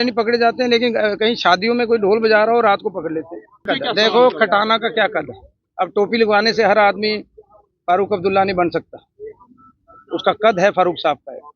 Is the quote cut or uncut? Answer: cut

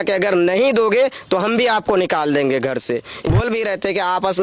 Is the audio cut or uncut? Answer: cut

